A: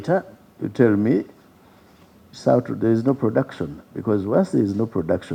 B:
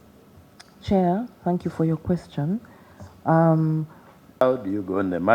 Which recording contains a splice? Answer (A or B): B